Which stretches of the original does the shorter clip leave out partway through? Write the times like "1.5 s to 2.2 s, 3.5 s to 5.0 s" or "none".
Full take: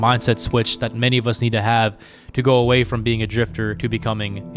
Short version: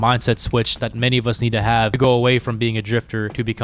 2.0 s to 2.5 s